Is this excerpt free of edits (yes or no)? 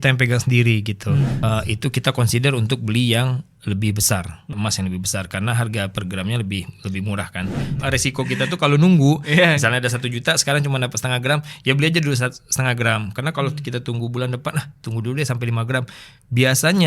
no